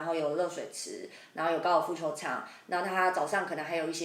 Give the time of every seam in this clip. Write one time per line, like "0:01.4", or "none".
none